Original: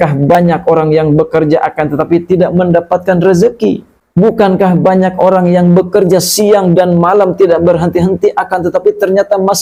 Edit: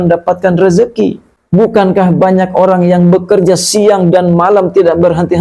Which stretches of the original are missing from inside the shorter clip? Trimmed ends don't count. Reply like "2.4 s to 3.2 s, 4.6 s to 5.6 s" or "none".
none

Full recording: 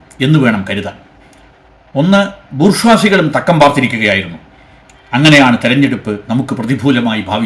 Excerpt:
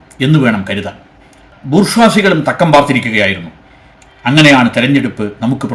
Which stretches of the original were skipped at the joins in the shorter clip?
1.5 s to 2.4 s

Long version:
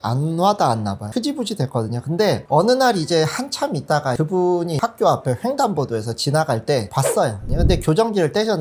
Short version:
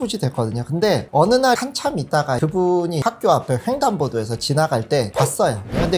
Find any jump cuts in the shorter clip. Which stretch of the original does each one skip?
3.0 s to 3.4 s

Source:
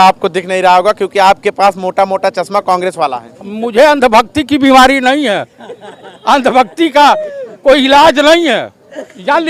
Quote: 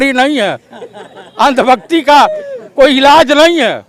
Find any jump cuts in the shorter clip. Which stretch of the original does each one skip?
none

